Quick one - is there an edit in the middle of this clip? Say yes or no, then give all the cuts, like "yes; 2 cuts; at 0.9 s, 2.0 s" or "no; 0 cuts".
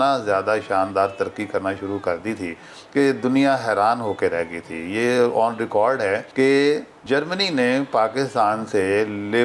no; 0 cuts